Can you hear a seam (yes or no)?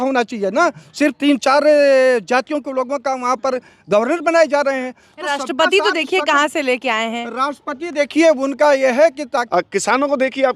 yes